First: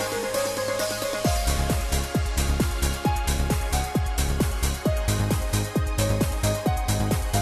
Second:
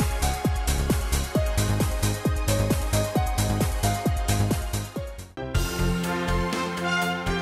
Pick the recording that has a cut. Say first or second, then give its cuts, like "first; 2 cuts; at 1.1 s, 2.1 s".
second; 1 cut; at 5.2 s